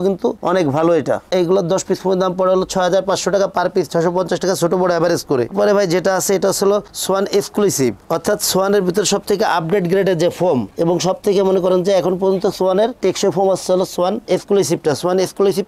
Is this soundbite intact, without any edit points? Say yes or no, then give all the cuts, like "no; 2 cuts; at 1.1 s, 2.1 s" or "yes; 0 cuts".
yes; 0 cuts